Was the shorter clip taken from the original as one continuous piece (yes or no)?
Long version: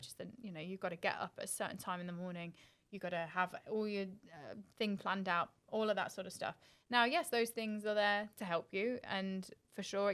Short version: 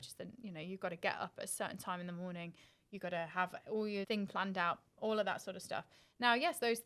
no